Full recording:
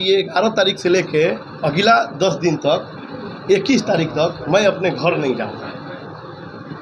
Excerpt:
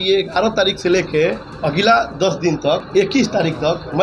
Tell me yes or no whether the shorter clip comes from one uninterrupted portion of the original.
no